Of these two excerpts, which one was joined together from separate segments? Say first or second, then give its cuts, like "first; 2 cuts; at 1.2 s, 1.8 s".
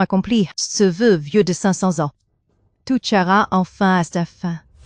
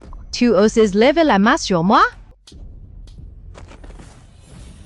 second; 1 cut; at 2.4 s